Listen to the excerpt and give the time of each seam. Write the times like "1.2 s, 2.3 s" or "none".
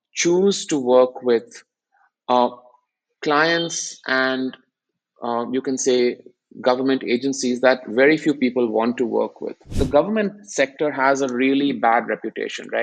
9.7 s